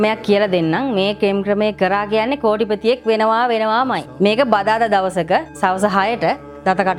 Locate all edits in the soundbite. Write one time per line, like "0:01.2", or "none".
none